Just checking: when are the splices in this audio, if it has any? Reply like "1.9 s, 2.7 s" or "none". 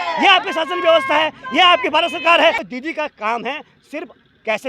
2.7 s